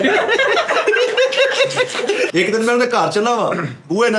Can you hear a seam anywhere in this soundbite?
yes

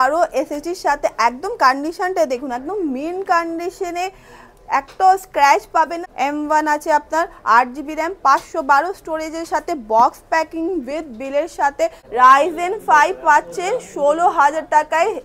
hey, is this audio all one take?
no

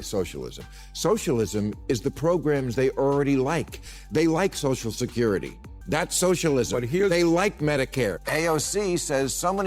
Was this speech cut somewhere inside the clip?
yes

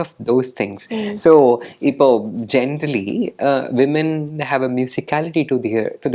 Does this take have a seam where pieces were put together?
no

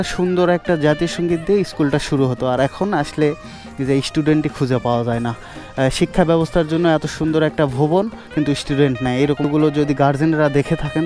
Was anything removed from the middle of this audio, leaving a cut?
yes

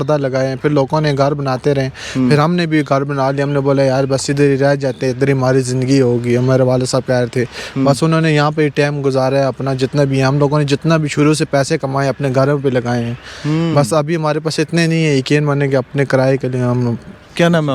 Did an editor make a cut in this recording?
no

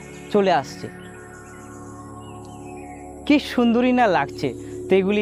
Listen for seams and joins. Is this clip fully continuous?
yes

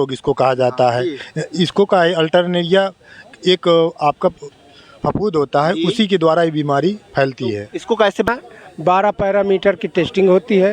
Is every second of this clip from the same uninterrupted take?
no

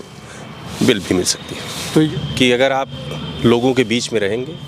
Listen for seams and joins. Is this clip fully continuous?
no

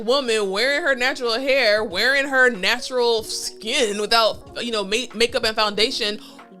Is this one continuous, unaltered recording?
yes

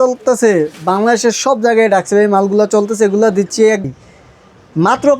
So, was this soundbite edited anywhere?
yes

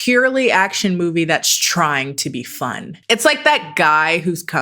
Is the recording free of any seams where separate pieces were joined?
no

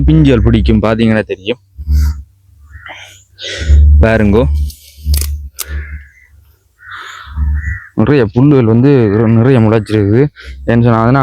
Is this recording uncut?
yes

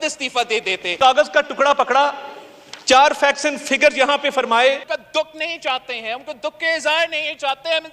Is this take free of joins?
no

